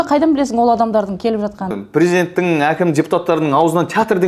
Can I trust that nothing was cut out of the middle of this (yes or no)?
no